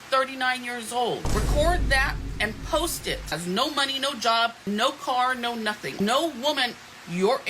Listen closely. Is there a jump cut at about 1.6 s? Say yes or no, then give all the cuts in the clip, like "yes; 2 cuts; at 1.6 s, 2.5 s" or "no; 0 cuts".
no; 3 cuts; at 3.3 s, 4.6 s, 6.0 s